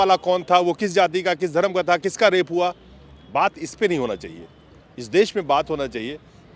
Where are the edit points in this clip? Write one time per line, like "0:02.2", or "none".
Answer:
none